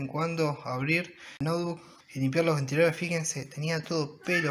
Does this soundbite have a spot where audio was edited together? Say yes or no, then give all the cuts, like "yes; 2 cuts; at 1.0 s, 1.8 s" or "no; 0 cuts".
yes; 1 cut; at 1.5 s